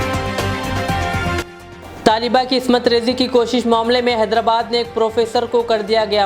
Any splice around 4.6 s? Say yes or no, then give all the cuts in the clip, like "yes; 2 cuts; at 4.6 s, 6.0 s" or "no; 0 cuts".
no; 1 cut; at 1.3 s